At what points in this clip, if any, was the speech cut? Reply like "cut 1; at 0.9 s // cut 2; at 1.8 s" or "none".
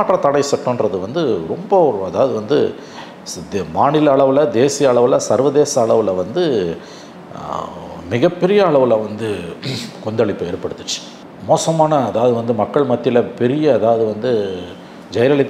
cut 1; at 11.3 s